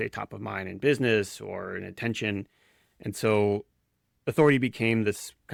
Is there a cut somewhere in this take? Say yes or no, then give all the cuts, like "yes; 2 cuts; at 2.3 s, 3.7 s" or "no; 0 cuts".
no; 0 cuts